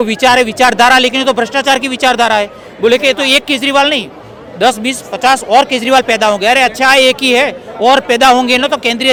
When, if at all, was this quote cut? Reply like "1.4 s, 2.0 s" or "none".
none